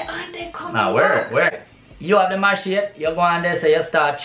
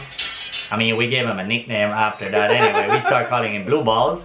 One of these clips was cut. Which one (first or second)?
first